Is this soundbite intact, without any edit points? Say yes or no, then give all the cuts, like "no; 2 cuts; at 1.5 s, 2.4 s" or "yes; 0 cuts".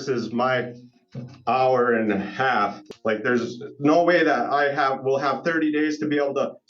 no; 1 cut; at 2.8 s